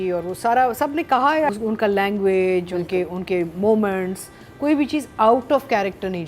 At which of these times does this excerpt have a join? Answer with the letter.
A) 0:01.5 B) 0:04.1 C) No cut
A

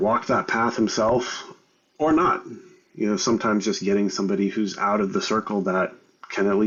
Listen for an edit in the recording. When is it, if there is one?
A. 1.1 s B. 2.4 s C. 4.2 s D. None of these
D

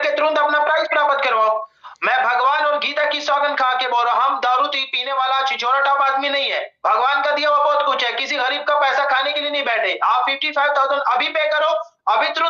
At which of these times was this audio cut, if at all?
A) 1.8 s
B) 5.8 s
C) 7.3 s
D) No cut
A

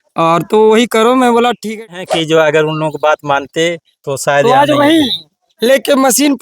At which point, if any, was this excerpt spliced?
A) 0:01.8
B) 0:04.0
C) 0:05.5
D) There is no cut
A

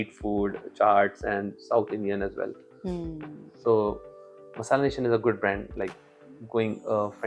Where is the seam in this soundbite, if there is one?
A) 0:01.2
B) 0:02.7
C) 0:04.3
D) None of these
D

